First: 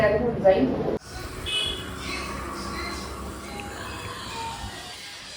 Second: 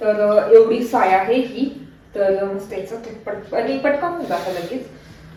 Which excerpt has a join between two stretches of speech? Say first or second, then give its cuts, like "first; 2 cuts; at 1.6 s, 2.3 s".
first; 1 cut; at 1.0 s